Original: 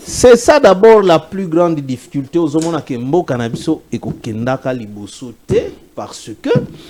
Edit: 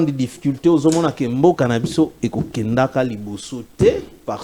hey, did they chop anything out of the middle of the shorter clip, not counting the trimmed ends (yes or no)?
no